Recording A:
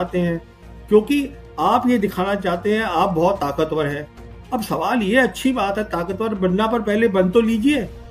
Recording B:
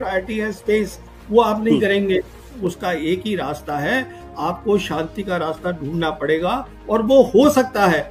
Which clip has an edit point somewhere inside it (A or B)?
B